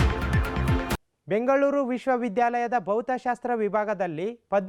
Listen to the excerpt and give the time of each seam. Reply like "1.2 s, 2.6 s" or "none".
0.9 s